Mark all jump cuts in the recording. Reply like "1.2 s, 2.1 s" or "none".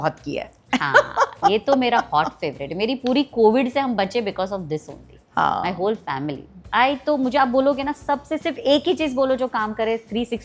none